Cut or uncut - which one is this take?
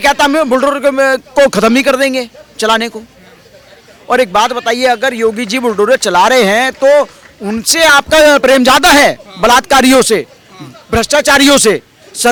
uncut